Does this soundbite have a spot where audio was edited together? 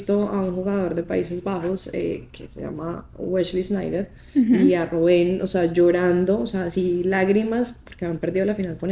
no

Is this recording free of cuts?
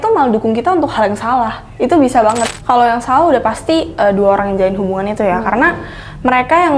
no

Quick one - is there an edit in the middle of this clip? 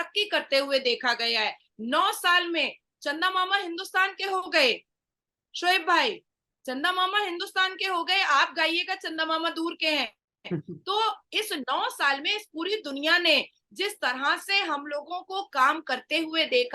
no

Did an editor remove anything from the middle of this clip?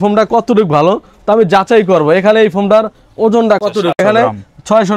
no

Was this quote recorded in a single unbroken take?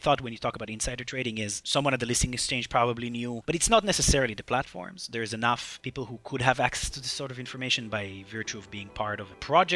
yes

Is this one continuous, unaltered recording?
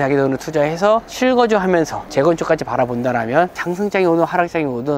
no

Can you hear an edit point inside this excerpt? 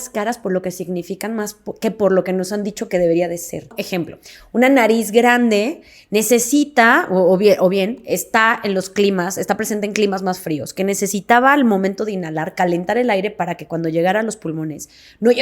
yes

